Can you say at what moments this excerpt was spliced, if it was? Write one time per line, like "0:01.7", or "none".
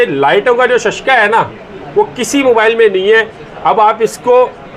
none